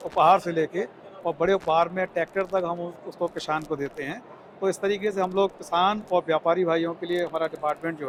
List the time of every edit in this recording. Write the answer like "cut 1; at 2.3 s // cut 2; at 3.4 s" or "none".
none